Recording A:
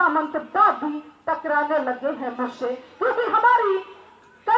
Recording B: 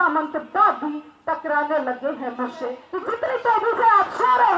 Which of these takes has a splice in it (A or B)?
B